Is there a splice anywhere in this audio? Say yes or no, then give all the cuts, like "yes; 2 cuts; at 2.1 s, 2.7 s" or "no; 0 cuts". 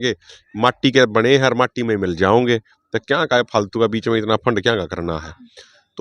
no; 0 cuts